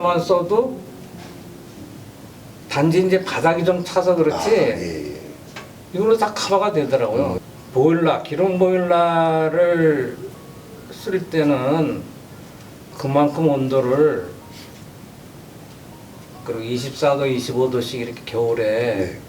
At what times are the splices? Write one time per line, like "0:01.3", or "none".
0:07.4